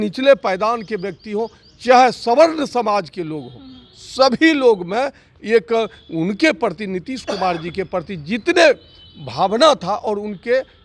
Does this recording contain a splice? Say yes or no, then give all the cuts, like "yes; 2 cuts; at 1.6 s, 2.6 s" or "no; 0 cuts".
no; 0 cuts